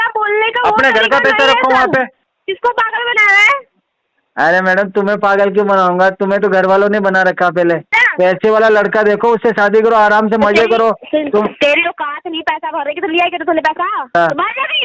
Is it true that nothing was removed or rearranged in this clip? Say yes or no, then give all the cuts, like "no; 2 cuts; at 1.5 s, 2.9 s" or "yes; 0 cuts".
no; 3 cuts; at 2.3 s, 8.0 s, 14.1 s